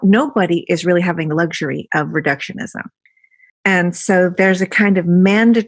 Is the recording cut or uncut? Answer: uncut